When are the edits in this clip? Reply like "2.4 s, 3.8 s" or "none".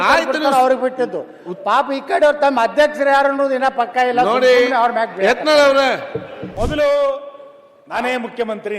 6.4 s